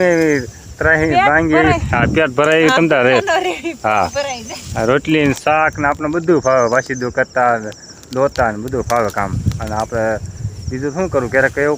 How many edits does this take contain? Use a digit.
0